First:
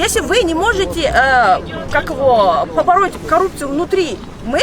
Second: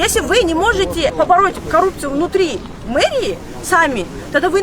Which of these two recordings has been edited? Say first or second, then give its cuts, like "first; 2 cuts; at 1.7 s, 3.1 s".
second; 1 cut; at 1.1 s